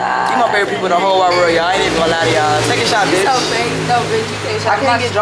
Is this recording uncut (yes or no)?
yes